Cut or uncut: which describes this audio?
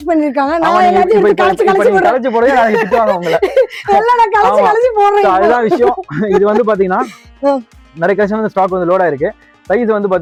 uncut